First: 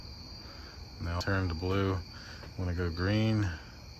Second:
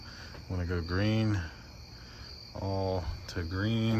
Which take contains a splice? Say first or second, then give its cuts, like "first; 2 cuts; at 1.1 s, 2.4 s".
first; 1 cut; at 1.2 s